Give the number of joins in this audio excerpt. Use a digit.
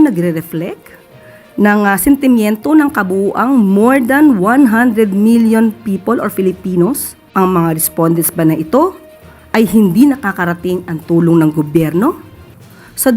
1